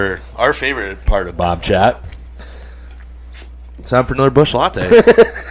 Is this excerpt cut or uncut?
cut